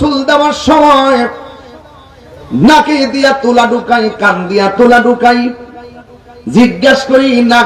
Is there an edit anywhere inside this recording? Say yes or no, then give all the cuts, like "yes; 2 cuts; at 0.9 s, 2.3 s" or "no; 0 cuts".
no; 0 cuts